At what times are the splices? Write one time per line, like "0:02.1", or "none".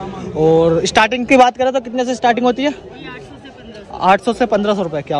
none